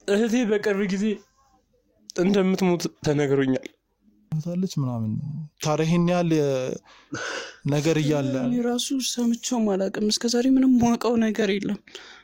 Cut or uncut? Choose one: cut